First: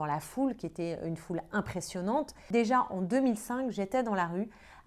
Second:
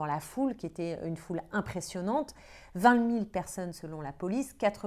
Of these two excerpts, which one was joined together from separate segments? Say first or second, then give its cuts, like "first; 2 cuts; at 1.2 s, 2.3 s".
first; 1 cut; at 2.4 s